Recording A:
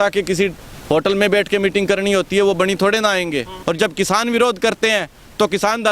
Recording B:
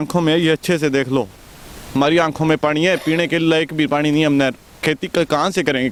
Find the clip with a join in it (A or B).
A